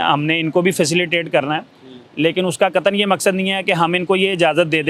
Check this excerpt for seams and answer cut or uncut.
uncut